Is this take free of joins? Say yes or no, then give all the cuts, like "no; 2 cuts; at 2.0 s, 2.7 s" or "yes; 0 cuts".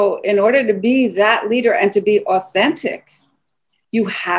yes; 0 cuts